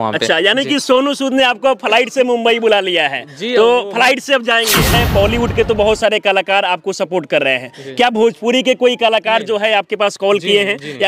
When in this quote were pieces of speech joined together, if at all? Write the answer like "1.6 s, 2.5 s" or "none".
4.9 s